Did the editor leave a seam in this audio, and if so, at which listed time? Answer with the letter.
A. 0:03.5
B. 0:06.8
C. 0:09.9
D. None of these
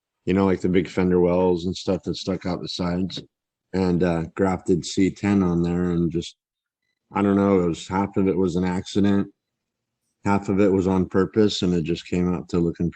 A